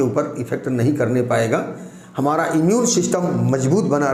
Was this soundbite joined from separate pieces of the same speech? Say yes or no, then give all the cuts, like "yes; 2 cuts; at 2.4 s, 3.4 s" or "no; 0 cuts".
no; 0 cuts